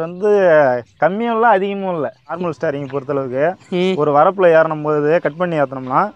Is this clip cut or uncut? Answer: cut